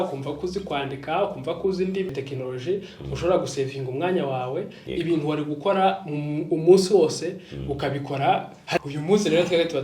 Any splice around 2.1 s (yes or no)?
yes